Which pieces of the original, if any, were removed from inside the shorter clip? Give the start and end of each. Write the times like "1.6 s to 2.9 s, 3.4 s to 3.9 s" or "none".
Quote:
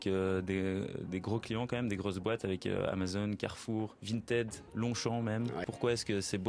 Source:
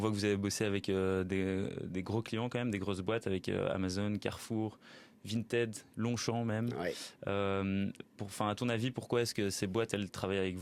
4.8 s to 5.2 s, 6.9 s to 8.9 s